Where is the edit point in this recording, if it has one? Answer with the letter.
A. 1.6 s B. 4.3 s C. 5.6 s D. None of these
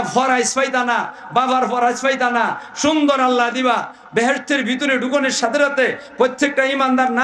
D